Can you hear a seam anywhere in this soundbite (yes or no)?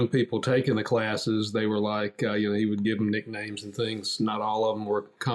no